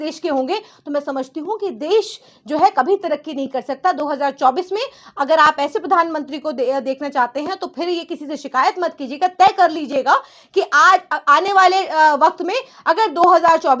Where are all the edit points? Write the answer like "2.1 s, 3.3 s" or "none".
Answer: none